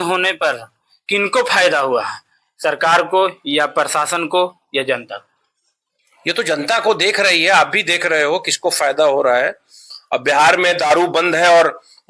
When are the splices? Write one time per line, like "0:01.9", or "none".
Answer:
none